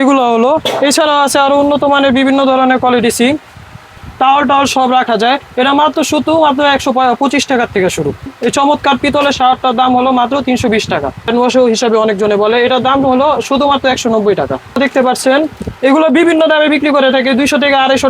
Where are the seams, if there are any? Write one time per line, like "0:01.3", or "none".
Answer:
0:04.0
0:08.3
0:11.3
0:14.8